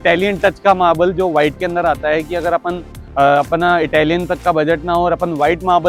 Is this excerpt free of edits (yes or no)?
yes